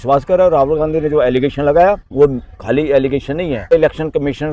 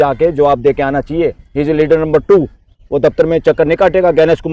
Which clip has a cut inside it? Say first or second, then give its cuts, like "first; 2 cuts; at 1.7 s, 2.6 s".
first; 2 cuts; at 2.1 s, 3.7 s